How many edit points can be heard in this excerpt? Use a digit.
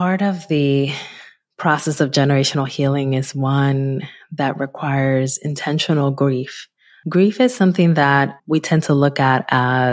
0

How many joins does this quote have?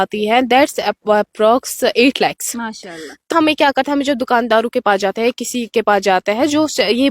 1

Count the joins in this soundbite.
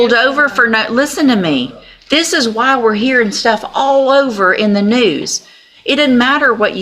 0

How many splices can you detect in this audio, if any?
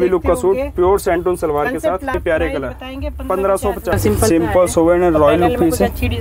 2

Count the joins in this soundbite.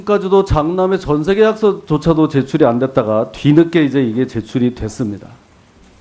0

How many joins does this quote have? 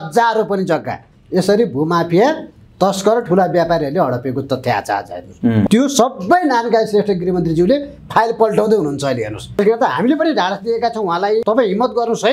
3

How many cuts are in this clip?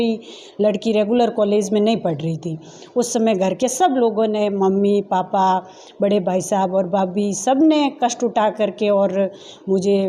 0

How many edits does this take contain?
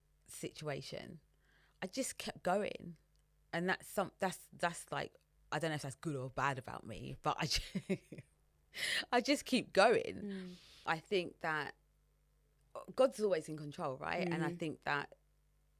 1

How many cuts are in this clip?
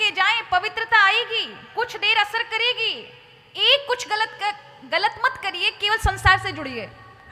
0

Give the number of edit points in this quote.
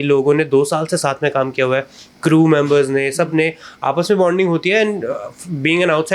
0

